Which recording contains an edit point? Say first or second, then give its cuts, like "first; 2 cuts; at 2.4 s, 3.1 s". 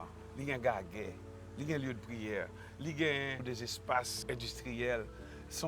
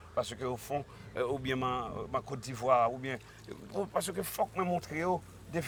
first; 2 cuts; at 3.4 s, 4.2 s